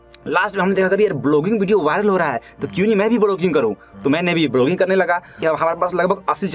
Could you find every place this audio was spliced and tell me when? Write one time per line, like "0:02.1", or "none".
0:05.4